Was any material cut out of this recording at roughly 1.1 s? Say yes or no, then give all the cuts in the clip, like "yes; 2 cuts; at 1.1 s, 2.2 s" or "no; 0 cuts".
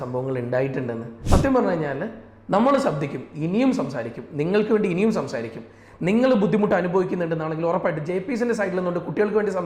yes; 1 cut; at 1.1 s